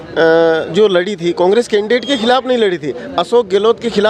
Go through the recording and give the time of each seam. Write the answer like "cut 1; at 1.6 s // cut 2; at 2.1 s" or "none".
none